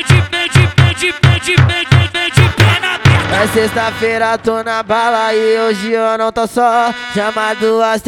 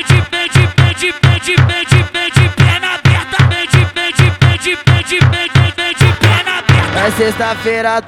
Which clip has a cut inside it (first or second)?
first